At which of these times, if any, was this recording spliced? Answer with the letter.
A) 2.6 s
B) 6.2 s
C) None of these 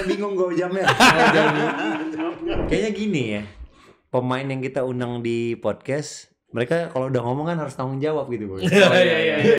A